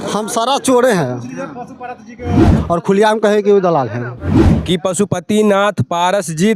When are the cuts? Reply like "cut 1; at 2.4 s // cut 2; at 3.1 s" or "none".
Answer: cut 1; at 2.5 s // cut 2; at 4.5 s